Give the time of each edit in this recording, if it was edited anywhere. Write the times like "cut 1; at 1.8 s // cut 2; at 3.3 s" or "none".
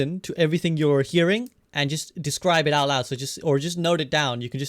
cut 1; at 1.6 s